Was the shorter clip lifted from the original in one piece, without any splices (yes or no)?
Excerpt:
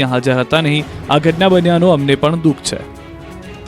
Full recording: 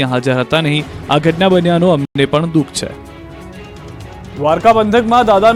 no